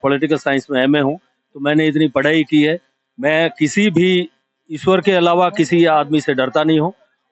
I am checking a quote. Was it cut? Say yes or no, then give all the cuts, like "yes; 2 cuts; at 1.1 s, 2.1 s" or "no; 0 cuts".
no; 0 cuts